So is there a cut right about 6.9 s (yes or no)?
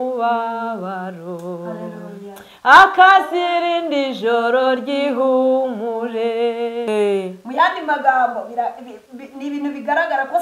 yes